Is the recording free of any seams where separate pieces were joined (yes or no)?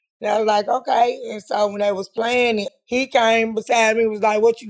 no